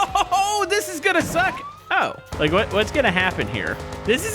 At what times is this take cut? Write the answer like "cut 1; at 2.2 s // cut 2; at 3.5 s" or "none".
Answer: cut 1; at 2.2 s